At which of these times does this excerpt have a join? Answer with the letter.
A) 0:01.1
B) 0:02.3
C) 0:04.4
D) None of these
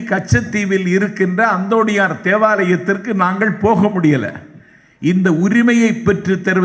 D